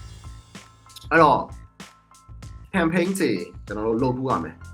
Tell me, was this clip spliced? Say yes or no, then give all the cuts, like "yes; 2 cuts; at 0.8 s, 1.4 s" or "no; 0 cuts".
yes; 1 cut; at 1.1 s